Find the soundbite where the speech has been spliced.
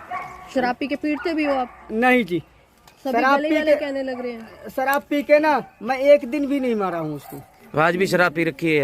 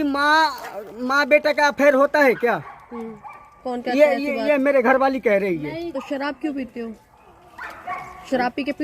second; 1 cut; at 5.9 s

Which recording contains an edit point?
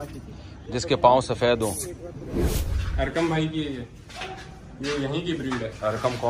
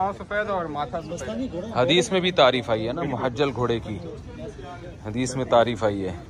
first; 1 cut; at 2.5 s

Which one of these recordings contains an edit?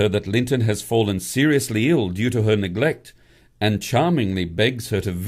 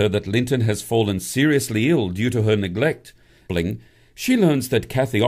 first; 1 cut; at 3.4 s

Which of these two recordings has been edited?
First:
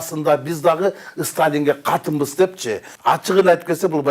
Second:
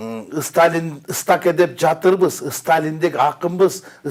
first; 1 cut; at 2.8 s

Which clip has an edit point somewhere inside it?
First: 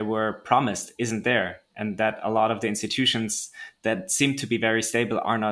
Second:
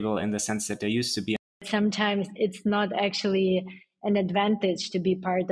second; 1 cut; at 1.6 s

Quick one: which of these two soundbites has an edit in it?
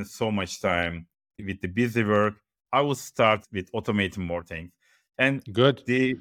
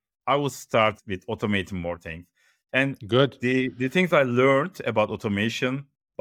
first; 1 cut; at 1.4 s

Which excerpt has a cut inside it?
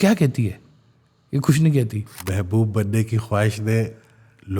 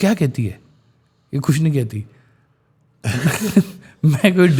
first; 1 cut; at 2.1 s

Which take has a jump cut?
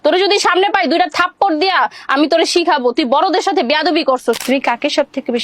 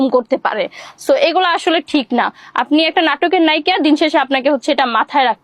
first; 1 cut; at 4.4 s

